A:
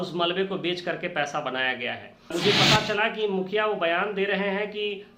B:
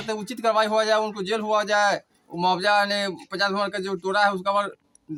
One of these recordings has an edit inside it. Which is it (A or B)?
A